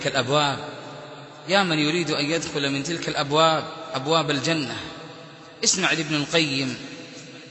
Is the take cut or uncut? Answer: uncut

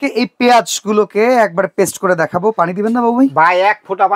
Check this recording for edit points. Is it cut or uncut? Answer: uncut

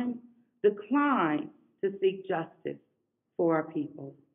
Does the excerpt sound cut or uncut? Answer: uncut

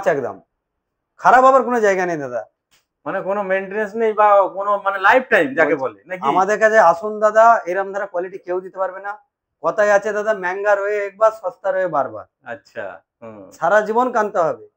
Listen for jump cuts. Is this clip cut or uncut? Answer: uncut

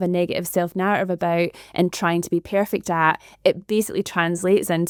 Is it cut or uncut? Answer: uncut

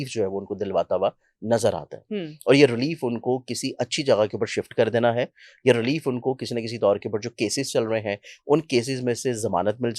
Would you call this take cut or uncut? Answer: uncut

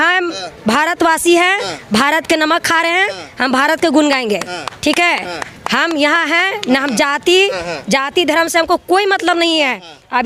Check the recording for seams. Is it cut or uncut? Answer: uncut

